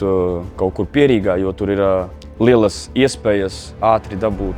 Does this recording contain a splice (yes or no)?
yes